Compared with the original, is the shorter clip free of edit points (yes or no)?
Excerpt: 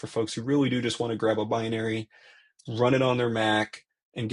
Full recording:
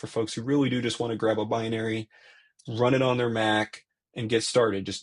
yes